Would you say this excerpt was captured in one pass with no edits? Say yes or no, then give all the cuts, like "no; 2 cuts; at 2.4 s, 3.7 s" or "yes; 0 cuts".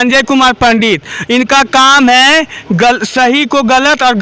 yes; 0 cuts